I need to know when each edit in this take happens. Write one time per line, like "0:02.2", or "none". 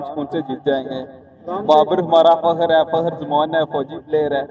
none